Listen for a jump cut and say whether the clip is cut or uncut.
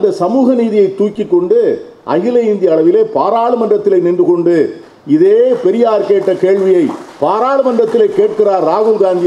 uncut